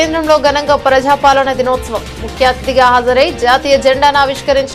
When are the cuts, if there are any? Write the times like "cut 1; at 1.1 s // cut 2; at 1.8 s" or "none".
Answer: none